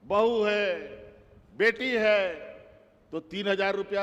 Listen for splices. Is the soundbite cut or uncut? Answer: uncut